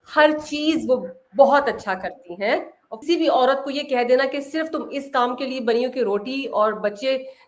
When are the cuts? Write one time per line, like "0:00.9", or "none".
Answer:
0:02.8